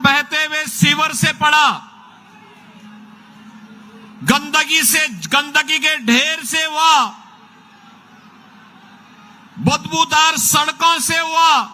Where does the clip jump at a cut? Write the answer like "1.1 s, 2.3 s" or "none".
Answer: none